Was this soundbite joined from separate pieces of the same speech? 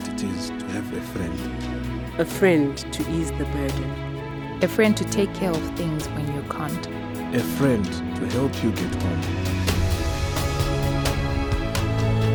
no; 0 cuts

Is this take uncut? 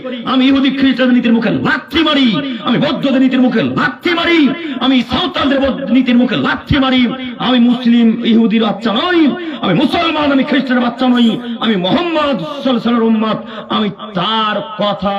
yes; 0 cuts

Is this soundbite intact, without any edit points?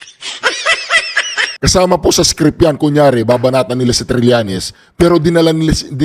no; 1 cut; at 1.5 s

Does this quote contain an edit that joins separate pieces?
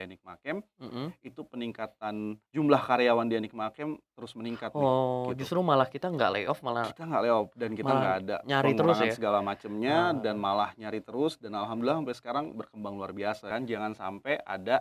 yes; 2 cuts; at 2.4 s, 13.5 s

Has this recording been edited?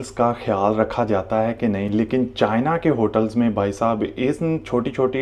no; 0 cuts

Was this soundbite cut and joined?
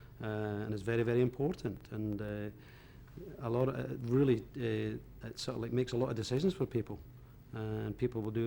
no; 0 cuts

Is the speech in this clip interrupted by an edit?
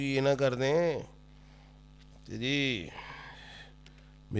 no; 0 cuts

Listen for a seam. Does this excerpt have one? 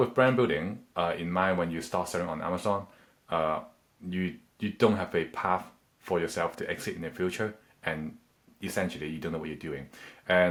no; 0 cuts

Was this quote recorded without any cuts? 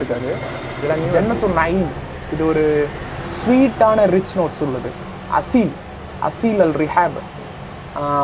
no; 1 cut; at 1.1 s

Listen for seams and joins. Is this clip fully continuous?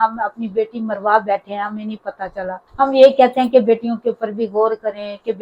yes; 0 cuts

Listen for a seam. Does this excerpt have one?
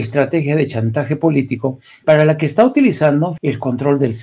yes; 2 cuts; at 1.9 s, 3.3 s

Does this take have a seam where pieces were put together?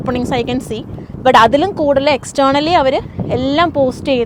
no; 0 cuts

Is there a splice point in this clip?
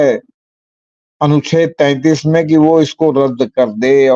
no; 0 cuts

